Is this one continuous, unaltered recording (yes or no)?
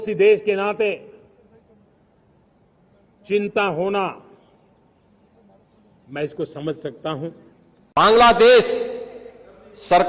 no